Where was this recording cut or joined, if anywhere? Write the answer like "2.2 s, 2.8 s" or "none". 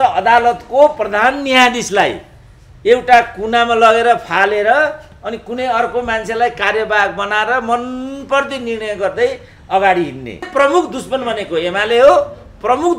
10.5 s

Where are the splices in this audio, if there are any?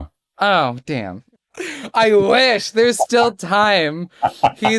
1.2 s

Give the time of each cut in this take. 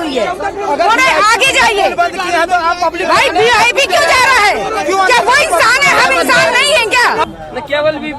7.2 s

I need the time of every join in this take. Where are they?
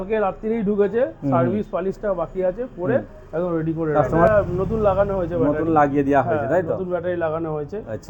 4.2 s

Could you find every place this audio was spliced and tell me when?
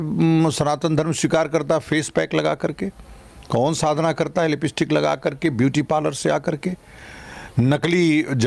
none

